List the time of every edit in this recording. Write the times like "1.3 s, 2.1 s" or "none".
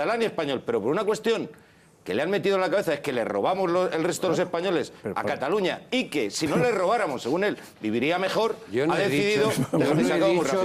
7.2 s